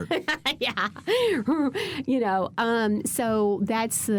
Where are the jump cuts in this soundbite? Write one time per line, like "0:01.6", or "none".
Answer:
none